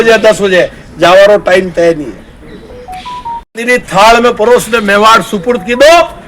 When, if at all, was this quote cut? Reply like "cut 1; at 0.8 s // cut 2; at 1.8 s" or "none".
cut 1; at 3.5 s